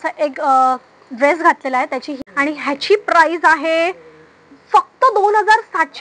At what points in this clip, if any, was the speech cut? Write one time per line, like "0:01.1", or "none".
0:02.1